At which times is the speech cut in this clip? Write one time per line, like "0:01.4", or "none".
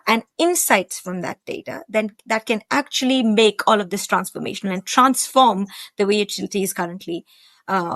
none